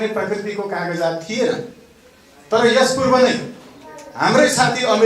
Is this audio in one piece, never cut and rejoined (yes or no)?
yes